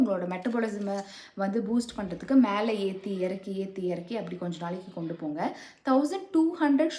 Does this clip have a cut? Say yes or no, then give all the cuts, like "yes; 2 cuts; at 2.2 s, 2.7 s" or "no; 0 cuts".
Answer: no; 0 cuts